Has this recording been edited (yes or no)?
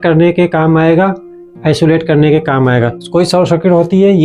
yes